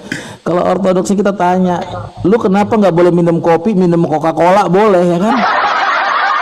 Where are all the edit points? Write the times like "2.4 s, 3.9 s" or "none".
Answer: none